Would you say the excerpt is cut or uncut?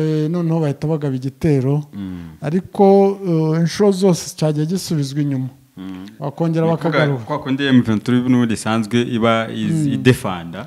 uncut